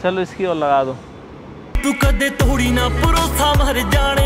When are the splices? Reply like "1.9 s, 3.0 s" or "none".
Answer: 1.6 s